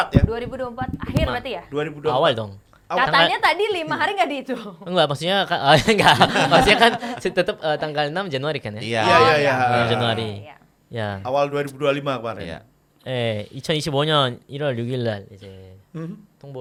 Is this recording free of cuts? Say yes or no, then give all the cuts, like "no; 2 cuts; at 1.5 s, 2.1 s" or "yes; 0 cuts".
yes; 0 cuts